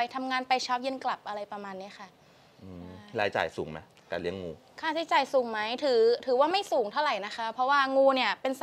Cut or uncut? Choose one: uncut